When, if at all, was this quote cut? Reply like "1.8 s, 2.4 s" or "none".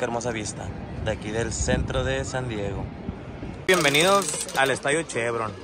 3.7 s